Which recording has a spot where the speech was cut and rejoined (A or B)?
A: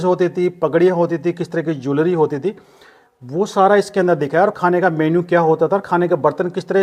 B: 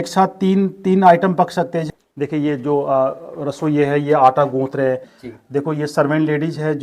B